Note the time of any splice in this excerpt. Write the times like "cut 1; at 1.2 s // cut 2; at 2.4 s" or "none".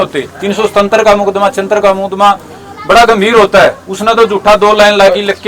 none